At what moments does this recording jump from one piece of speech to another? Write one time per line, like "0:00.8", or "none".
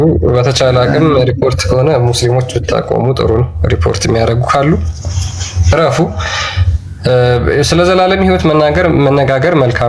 none

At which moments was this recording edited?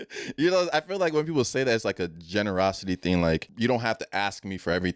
0:03.5

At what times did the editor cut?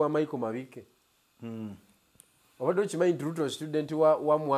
none

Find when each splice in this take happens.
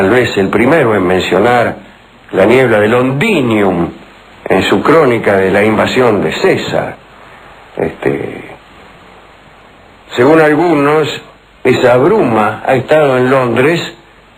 0:12.6

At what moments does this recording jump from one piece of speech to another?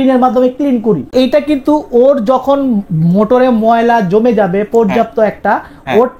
0:01.1

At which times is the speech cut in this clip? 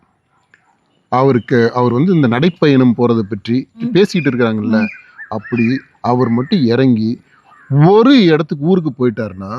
0:03.9

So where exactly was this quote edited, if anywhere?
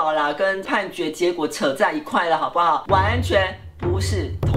none

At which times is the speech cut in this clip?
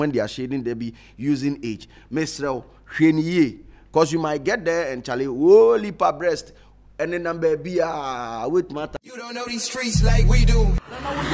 0:08.9

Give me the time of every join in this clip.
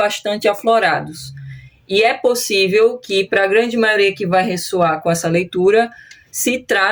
none

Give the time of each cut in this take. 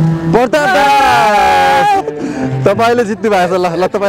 0:01.6

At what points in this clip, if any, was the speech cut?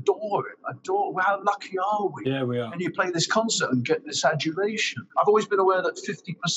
0:02.8
0:05.0

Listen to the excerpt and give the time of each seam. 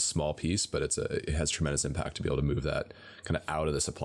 none

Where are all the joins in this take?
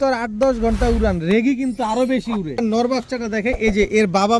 0:02.6

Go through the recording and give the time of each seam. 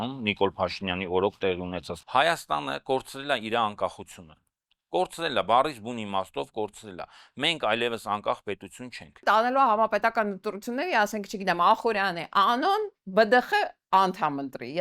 0:01.9
0:09.2

